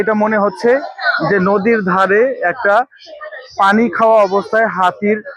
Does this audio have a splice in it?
no; 0 cuts

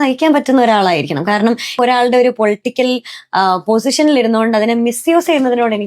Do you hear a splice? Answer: yes; 1 cut; at 1.8 s

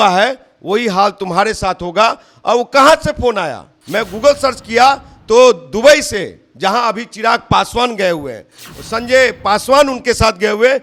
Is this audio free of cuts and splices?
yes; 0 cuts

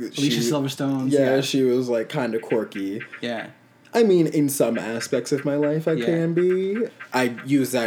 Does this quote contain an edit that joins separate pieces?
yes; 1 cut; at 6.9 s

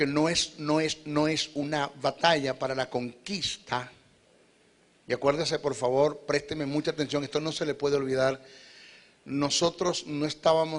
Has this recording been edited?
yes; 1 cut; at 5.6 s

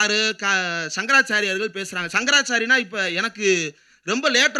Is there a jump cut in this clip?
no; 0 cuts

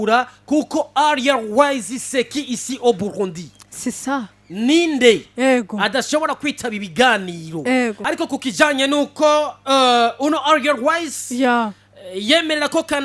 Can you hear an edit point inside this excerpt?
yes; 1 cut; at 8.0 s

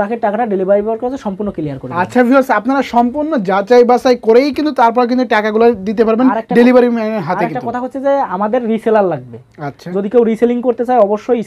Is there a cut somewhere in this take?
no; 0 cuts

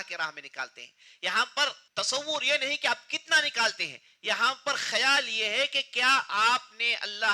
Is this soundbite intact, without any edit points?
no; 1 cut; at 1.8 s

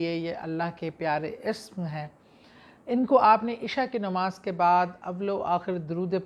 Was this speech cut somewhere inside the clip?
no; 0 cuts

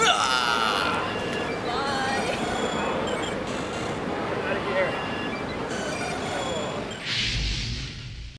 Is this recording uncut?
no; 1 cut; at 7.0 s

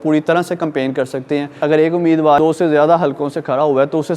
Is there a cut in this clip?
yes; 2 cuts; at 1.5 s, 2.4 s

